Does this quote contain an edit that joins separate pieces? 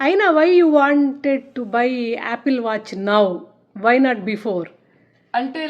no; 0 cuts

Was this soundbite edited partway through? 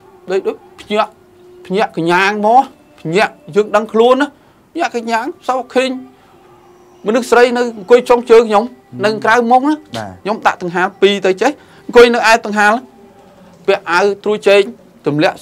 no; 0 cuts

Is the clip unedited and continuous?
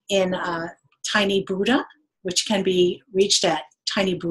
no; 1 cut; at 1.2 s

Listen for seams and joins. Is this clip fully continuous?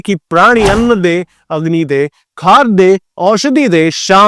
yes; 0 cuts

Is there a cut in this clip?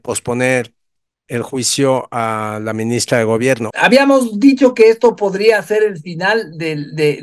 yes; 1 cut; at 3.7 s

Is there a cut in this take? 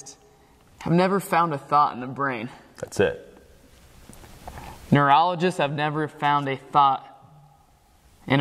no; 0 cuts

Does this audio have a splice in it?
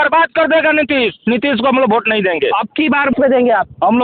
yes; 1 cut; at 3.1 s

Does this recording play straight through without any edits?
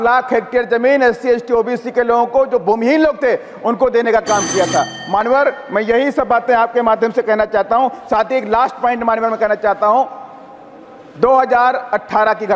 yes; 0 cuts

